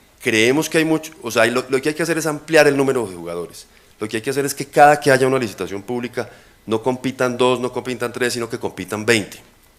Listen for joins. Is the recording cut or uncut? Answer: cut